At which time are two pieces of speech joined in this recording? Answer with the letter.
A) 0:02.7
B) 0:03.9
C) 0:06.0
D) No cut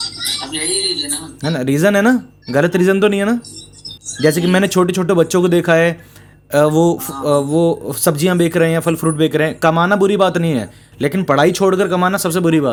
D